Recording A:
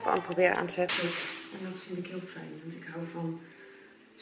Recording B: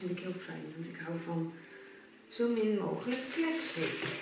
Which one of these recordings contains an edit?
A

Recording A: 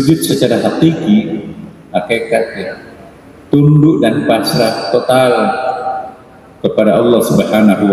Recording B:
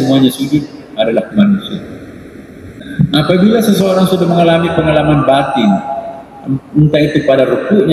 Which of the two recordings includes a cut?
B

